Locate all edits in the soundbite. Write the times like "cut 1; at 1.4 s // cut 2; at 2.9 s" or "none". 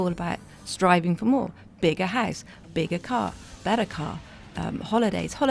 none